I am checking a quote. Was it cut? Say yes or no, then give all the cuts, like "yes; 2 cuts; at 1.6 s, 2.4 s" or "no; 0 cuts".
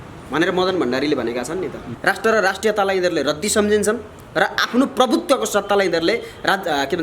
yes; 1 cut; at 1.9 s